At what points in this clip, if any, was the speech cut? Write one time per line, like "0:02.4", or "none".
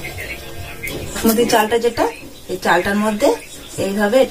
0:01.2